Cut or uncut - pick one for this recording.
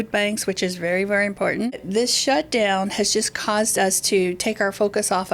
cut